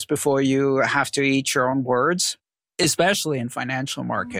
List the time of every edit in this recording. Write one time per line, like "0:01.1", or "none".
0:02.3